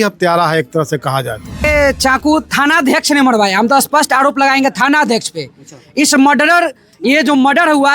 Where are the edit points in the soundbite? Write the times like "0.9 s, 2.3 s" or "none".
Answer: 1.6 s